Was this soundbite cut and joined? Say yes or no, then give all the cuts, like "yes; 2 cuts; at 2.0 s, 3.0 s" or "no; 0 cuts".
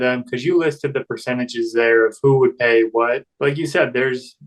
yes; 1 cut; at 3.3 s